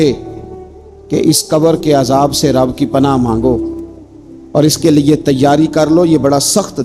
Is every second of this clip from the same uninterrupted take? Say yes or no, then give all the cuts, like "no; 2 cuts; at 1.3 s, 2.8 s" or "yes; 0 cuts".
yes; 0 cuts